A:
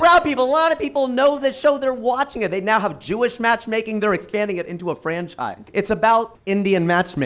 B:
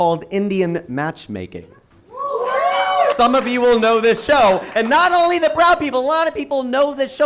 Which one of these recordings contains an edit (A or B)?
A